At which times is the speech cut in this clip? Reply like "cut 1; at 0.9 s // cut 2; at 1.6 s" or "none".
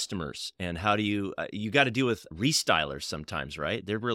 cut 1; at 2.3 s